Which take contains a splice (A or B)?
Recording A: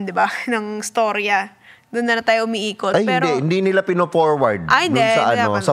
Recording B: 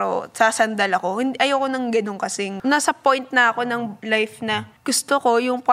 B